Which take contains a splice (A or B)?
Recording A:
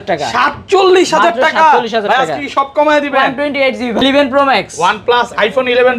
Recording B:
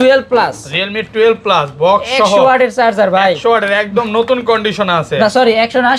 A